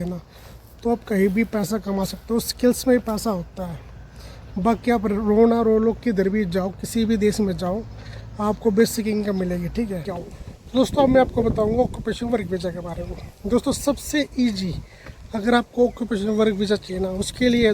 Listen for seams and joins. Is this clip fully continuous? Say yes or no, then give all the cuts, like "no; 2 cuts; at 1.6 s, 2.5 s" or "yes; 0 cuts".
no; 1 cut; at 10.1 s